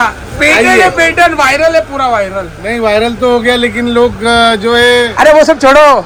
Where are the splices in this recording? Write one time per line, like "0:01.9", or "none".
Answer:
none